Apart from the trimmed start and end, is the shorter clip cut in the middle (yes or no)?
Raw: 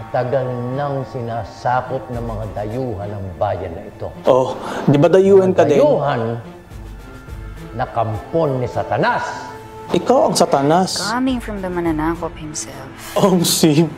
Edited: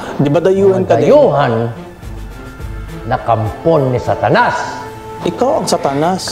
no